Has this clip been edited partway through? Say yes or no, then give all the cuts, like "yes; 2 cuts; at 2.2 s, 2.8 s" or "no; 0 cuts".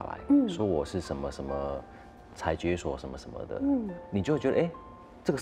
yes; 1 cut; at 4.0 s